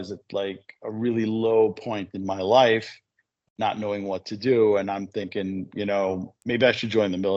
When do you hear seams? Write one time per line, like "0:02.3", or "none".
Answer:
0:06.3